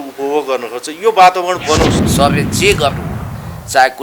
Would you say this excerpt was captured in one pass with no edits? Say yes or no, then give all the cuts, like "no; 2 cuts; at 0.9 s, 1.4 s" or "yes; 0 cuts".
no; 1 cut; at 2.0 s